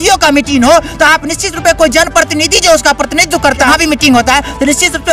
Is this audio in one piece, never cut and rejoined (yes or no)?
no